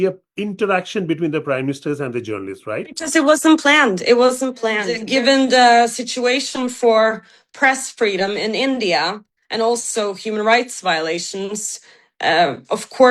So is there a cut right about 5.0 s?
yes; 1 cut; at 5.0 s

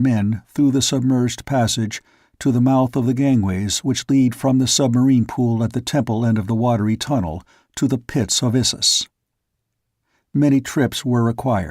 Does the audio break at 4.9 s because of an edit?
no; 1 cut; at 3.5 s

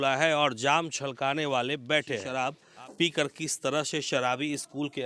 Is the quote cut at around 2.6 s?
yes; 1 cut; at 2.6 s

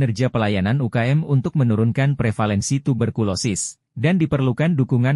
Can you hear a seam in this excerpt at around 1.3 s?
no; 0 cuts

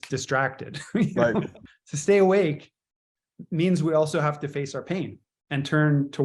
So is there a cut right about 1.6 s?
yes; 1 cut; at 1.6 s

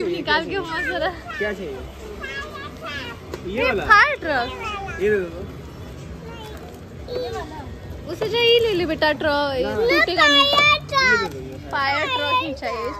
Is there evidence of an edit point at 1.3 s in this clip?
no; 0 cuts

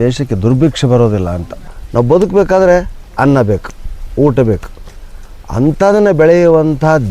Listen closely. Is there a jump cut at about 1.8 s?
yes; 1 cut; at 1.8 s

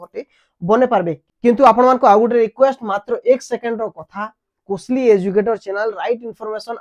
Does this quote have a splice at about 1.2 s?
yes; 1 cut; at 1.2 s

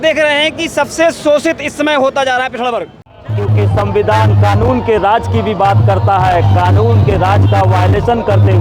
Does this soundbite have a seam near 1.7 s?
no; 1 cut; at 3.2 s

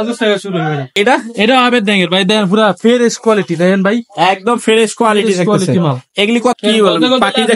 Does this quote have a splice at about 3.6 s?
no; 2 cuts; at 0.9 s, 6.5 s

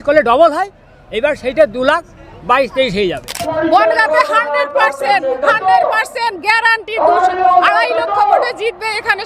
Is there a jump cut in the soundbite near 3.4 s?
yes; 1 cut; at 3.4 s

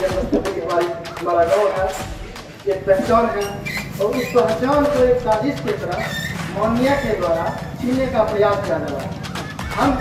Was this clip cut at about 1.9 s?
no; 0 cuts

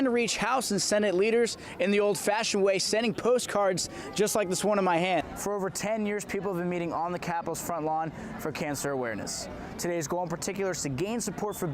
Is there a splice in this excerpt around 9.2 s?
no; 1 cut; at 5.2 s

